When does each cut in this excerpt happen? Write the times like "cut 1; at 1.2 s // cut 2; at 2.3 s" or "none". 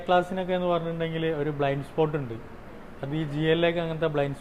none